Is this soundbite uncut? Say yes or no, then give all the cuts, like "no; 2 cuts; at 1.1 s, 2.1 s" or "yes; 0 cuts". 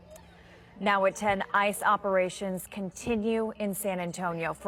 yes; 0 cuts